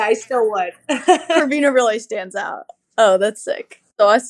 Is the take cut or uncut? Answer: cut